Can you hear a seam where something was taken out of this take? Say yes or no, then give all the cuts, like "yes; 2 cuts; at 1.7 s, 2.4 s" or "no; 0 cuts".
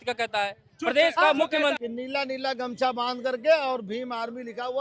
yes; 1 cut; at 1.8 s